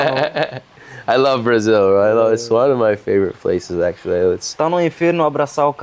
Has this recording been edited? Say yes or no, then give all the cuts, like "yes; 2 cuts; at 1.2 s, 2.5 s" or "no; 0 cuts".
no; 0 cuts